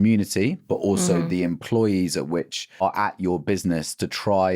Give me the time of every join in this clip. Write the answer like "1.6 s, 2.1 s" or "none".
2.8 s

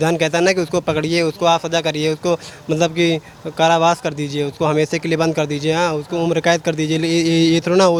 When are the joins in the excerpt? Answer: none

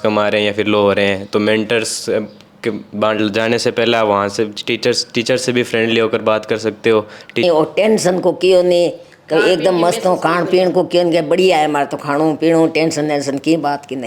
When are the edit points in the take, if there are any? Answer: 7.4 s

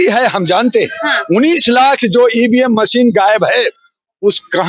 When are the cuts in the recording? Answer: none

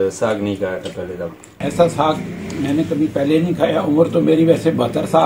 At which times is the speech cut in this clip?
1.4 s

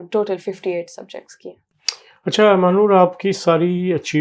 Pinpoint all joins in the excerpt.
none

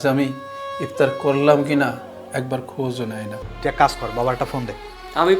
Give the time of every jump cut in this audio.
3.4 s

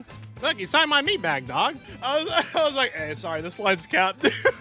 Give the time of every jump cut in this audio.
1.9 s

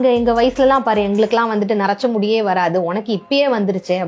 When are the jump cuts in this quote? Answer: none

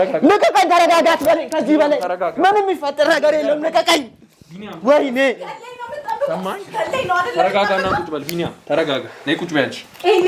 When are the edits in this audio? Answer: none

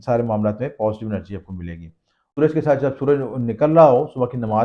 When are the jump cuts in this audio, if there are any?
2.3 s

